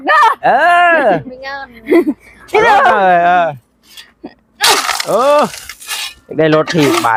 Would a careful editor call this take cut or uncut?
uncut